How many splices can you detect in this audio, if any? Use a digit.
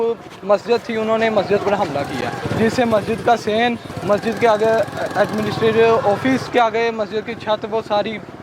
3